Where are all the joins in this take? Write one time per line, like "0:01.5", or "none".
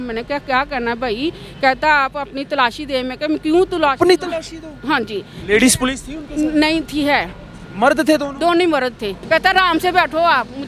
0:09.2